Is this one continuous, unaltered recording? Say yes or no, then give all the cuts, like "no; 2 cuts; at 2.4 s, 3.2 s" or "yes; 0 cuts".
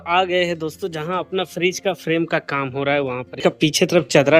no; 1 cut; at 3.4 s